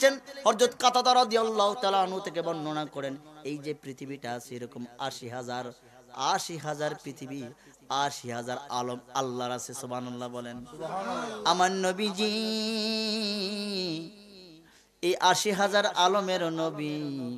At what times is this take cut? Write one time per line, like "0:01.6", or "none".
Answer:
none